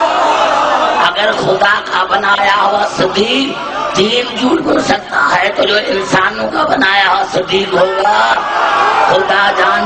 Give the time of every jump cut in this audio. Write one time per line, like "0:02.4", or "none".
none